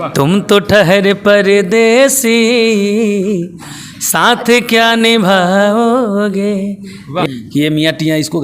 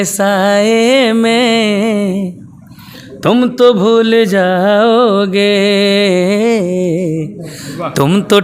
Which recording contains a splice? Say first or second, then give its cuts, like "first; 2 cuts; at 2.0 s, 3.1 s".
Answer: first; 1 cut; at 7.4 s